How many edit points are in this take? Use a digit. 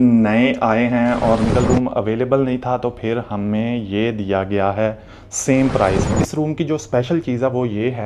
2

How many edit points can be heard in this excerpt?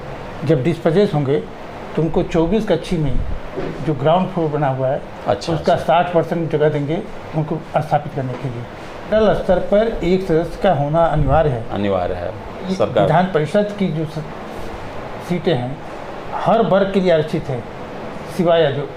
2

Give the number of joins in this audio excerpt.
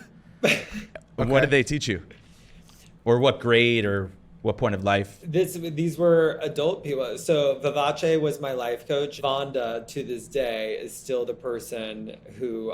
1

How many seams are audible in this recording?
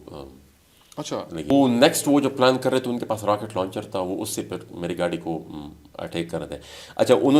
1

